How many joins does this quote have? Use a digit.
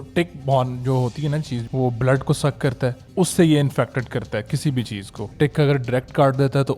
3